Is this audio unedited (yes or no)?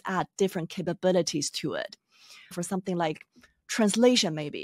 no